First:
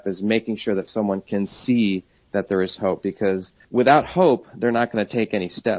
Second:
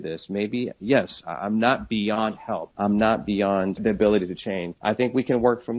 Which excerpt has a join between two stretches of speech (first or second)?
second